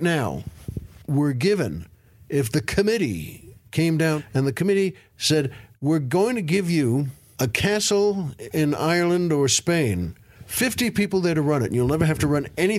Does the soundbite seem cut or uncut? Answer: cut